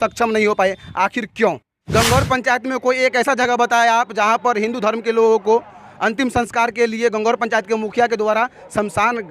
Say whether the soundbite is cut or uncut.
cut